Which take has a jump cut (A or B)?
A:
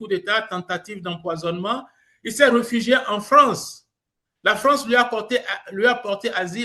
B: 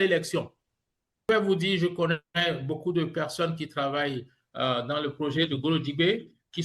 B